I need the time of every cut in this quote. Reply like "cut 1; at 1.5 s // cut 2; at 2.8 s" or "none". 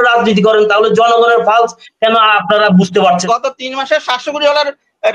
cut 1; at 3.2 s